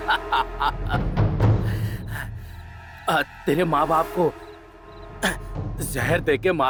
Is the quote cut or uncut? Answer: uncut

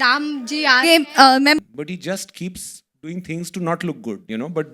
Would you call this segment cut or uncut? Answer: cut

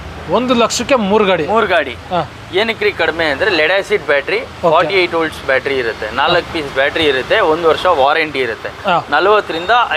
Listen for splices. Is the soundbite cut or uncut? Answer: uncut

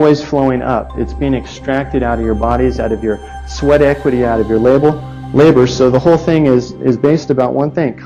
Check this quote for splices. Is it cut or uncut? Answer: uncut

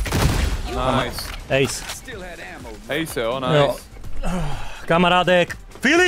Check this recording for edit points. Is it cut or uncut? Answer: uncut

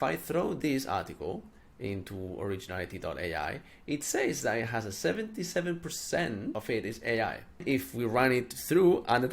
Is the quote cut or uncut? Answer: cut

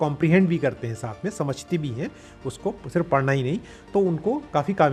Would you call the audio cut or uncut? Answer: uncut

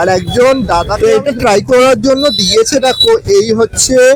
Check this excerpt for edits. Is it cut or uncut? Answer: cut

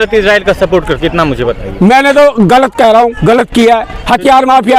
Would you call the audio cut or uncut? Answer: uncut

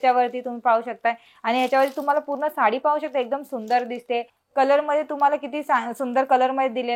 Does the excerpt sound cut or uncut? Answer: cut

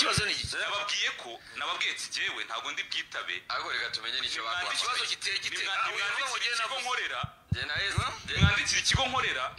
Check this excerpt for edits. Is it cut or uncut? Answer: uncut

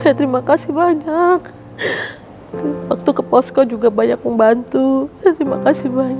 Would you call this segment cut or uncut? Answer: uncut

